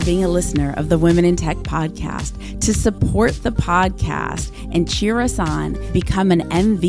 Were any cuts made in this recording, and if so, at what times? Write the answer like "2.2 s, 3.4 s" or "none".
none